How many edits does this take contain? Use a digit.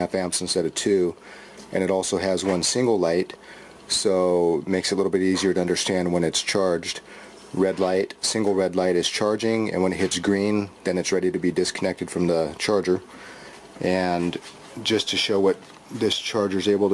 0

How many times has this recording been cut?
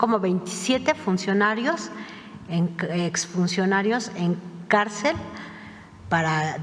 0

